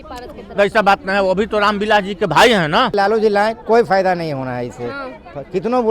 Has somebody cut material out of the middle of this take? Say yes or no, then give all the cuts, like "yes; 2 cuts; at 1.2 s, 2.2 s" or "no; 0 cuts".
yes; 1 cut; at 2.9 s